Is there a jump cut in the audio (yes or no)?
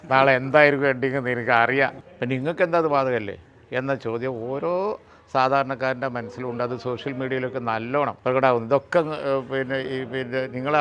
yes